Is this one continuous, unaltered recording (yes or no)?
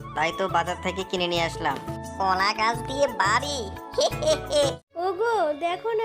no